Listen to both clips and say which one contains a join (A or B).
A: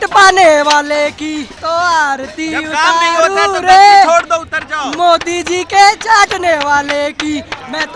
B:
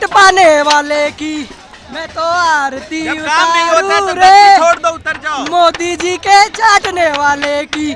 A